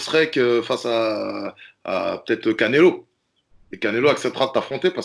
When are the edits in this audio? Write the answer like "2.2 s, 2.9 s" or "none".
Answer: none

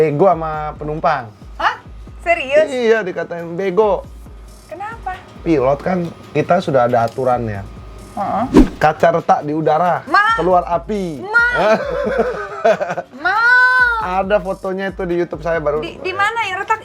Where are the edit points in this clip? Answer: 8.6 s

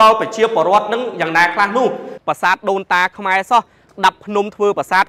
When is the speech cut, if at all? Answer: 2.1 s

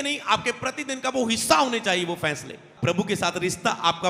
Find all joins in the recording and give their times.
2.7 s

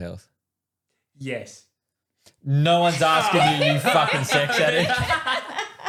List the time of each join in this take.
none

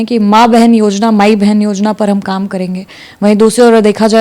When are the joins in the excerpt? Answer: none

